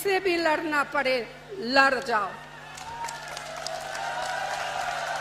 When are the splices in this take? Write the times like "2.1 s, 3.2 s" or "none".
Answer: none